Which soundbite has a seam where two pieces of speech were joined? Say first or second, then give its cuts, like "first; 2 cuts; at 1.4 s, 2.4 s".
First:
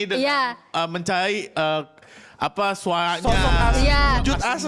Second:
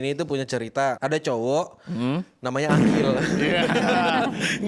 second; 1 cut; at 1.0 s